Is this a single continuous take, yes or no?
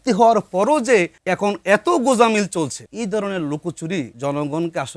no